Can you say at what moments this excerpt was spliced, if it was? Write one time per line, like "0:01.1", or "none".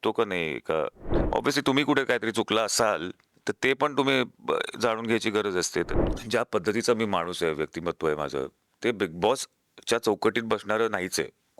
0:01.0
0:05.9